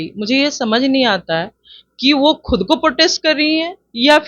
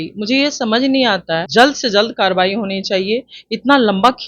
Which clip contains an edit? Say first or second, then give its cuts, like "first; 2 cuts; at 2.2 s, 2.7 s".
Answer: second; 1 cut; at 1.5 s